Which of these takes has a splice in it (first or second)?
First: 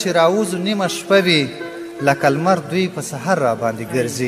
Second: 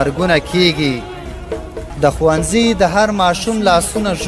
second